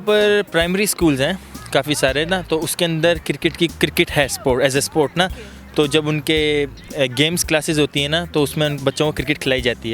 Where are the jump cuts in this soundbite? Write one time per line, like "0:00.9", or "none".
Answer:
none